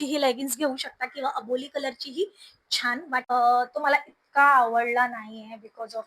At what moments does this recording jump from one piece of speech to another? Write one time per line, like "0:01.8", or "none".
0:03.3